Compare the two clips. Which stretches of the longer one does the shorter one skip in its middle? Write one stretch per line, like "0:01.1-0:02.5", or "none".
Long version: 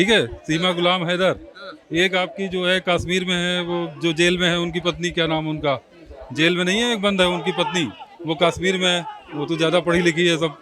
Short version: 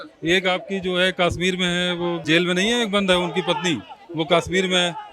0:03.9-0:06.3